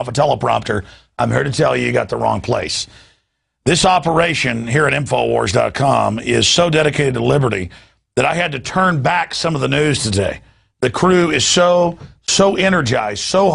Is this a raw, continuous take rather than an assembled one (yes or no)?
no